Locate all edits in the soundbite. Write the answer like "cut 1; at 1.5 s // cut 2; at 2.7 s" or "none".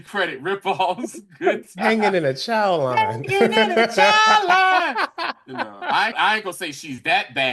cut 1; at 6.1 s